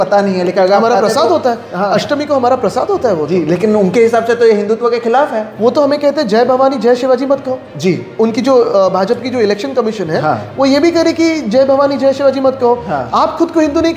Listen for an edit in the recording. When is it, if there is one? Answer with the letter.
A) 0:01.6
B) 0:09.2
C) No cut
C